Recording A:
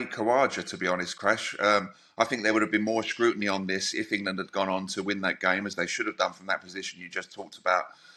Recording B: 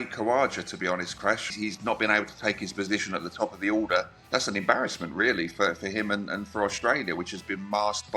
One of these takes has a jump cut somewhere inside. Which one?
B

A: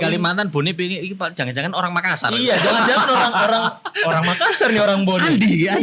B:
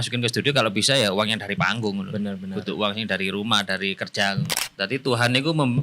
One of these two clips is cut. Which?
B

